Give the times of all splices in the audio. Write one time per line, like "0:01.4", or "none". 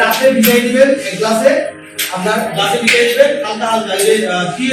none